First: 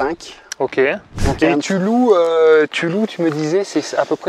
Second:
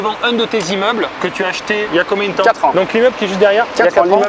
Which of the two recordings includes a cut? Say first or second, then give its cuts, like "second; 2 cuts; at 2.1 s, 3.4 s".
first; 1 cut; at 1.1 s